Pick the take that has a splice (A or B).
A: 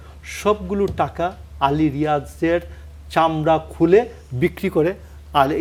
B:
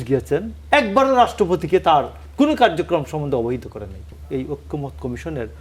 B